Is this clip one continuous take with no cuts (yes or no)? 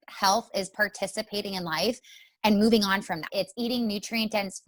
no